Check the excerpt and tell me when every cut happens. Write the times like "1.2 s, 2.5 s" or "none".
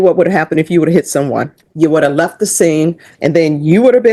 1.6 s, 3.1 s